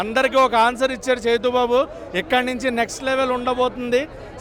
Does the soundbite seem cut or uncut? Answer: uncut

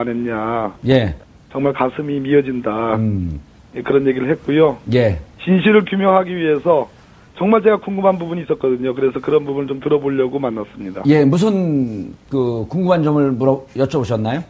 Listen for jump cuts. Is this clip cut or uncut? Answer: cut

